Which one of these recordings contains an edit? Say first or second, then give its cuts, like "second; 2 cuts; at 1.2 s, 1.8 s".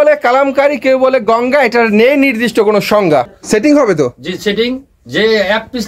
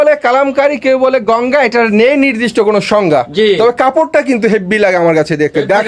first; 1 cut; at 3.3 s